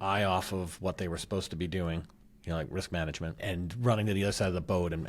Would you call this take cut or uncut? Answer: cut